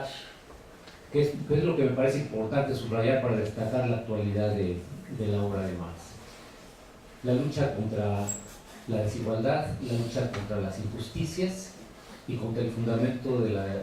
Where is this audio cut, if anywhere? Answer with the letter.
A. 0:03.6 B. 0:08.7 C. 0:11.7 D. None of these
A